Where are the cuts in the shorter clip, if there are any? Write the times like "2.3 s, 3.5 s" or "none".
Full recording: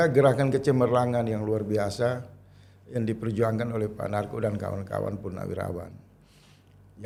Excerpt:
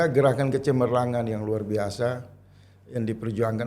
none